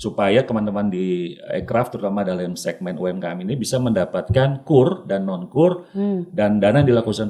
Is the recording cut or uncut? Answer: uncut